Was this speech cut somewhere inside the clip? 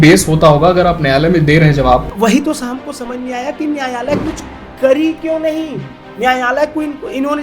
yes; 1 cut; at 2.1 s

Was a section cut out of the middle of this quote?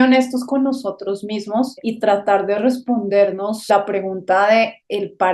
yes; 2 cuts; at 1.8 s, 3.6 s

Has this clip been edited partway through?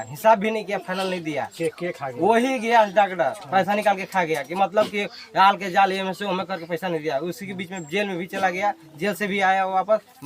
no; 0 cuts

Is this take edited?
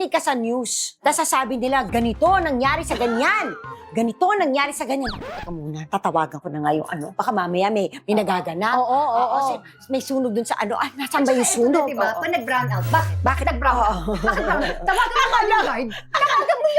no; 0 cuts

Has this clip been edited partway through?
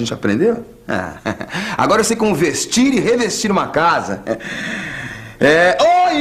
yes; 1 cut; at 2.6 s

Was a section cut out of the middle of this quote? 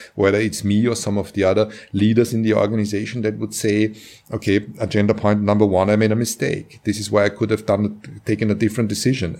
yes; 1 cut; at 2.7 s

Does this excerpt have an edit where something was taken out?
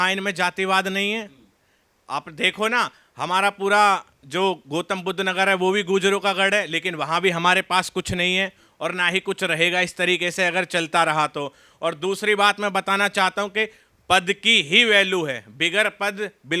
no; 0 cuts

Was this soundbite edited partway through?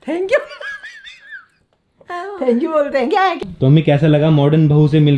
yes; 1 cut; at 3.4 s

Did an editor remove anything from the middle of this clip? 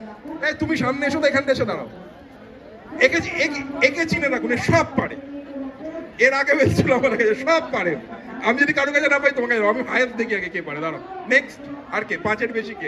no; 0 cuts

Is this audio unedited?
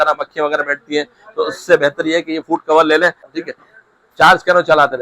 no; 1 cut; at 3.2 s

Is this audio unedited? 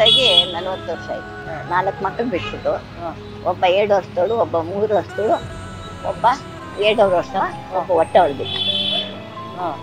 no; 1 cut; at 1.4 s

